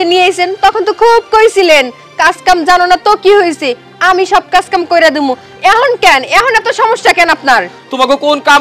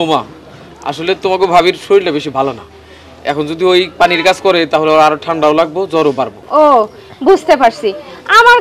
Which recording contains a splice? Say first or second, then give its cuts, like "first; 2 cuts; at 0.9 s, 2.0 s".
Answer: second; 1 cut; at 6.4 s